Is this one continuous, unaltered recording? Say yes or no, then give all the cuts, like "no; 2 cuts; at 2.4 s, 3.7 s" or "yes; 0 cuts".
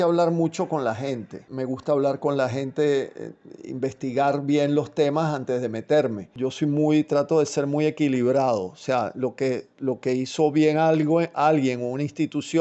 no; 1 cut; at 6.3 s